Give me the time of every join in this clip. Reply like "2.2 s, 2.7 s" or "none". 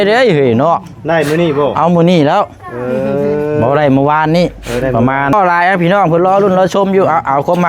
5.3 s